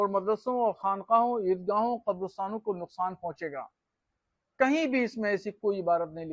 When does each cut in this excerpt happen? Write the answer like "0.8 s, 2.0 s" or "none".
none